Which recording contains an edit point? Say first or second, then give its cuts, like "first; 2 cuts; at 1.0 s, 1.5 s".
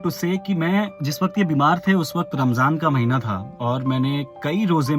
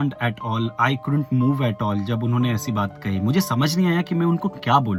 first; 2 cuts; at 1.0 s, 3.5 s